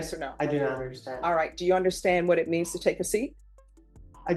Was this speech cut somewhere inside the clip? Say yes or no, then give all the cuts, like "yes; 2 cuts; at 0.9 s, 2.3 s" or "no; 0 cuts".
no; 0 cuts